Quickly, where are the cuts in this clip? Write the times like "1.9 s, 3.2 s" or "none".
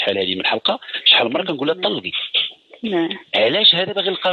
none